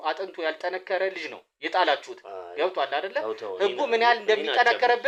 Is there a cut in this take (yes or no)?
no